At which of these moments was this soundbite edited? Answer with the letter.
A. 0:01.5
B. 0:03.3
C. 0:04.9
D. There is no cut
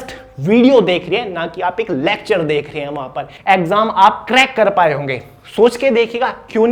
B